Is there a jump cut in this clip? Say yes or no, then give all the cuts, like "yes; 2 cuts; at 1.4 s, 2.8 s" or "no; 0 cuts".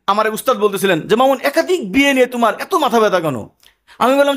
no; 0 cuts